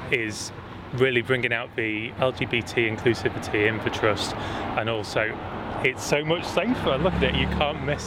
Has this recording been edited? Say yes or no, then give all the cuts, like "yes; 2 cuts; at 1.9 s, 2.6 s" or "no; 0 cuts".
yes; 1 cut; at 2.1 s